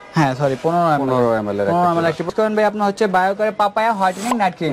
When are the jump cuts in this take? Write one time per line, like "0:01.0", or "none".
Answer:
0:02.3